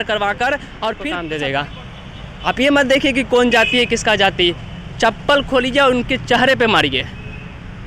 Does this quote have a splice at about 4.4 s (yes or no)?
no